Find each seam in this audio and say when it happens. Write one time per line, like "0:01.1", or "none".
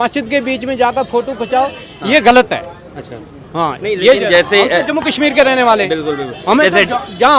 none